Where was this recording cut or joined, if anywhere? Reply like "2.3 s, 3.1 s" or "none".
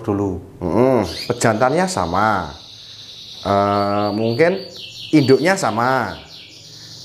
1.2 s